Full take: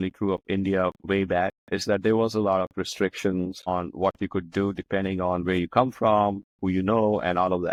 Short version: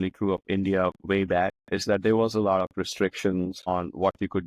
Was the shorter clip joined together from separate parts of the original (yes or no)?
no